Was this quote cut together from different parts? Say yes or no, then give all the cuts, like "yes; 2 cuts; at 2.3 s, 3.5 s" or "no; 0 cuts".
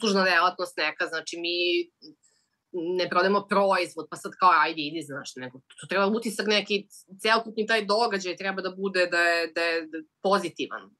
no; 0 cuts